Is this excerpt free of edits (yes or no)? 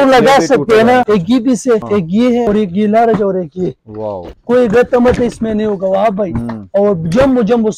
no